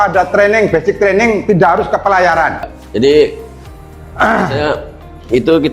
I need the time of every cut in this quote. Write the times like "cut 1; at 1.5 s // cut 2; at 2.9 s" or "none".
cut 1; at 2.8 s